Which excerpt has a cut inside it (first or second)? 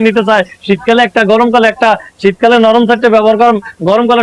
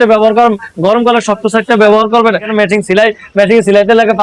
second